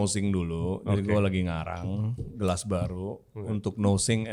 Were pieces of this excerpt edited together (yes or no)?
no